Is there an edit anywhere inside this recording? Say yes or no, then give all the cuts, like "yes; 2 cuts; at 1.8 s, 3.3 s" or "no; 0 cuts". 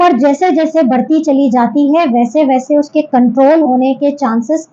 no; 0 cuts